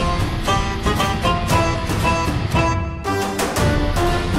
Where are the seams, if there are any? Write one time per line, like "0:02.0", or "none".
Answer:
none